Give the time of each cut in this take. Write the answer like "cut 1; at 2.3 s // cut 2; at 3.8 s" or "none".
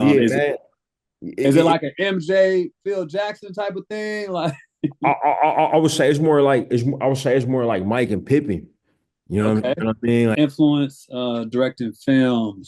cut 1; at 10.4 s